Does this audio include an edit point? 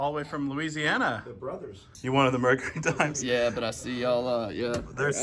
yes; 1 cut; at 1.8 s

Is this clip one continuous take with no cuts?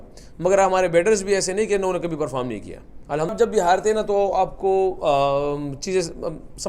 no; 1 cut; at 3.3 s

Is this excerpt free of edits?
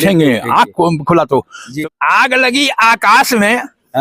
no; 1 cut; at 1.6 s

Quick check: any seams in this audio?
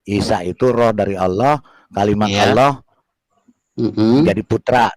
no; 0 cuts

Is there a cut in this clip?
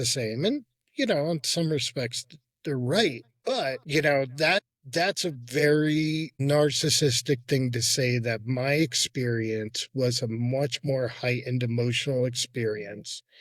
yes; 3 cuts; at 3.8 s, 4.8 s, 6.4 s

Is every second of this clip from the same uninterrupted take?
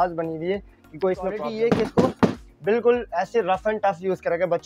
no; 1 cut; at 1.5 s

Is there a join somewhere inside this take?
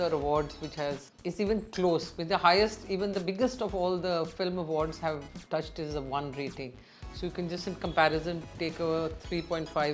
no; 0 cuts

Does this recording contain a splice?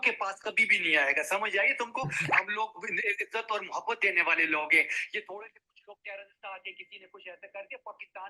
no; 0 cuts

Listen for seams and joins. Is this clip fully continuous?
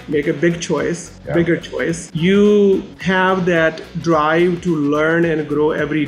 no; 3 cuts; at 1.1 s, 2.1 s, 2.9 s

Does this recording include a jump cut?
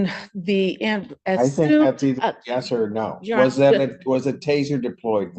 no; 0 cuts

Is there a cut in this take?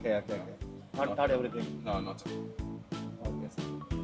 no; 0 cuts

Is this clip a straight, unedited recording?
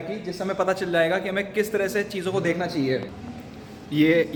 yes; 0 cuts

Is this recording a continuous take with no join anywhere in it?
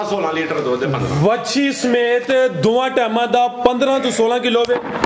yes; 0 cuts

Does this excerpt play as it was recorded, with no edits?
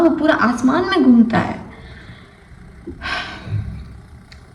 yes; 0 cuts

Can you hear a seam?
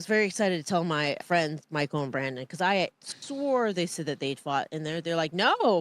yes; 1 cut; at 1.2 s

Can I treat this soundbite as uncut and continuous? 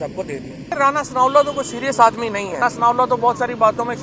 no; 2 cuts; at 0.7 s, 2.6 s

